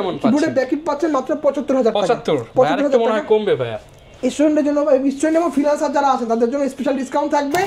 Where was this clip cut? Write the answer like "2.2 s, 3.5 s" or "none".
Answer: none